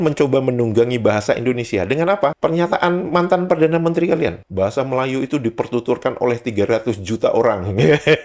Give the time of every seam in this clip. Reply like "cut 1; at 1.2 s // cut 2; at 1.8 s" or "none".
none